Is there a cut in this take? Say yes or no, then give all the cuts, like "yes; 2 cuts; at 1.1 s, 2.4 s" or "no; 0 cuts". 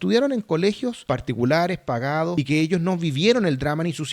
yes; 2 cuts; at 1.0 s, 2.3 s